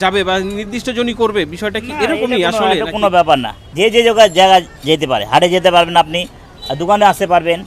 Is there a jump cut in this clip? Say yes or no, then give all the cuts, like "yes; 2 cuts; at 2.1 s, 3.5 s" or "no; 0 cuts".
no; 0 cuts